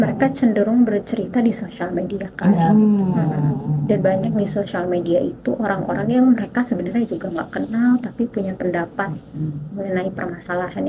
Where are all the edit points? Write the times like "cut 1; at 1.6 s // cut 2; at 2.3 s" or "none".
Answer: none